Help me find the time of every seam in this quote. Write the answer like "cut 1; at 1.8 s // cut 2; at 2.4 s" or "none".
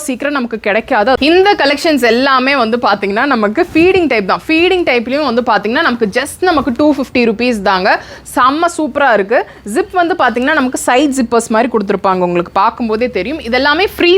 cut 1; at 1.2 s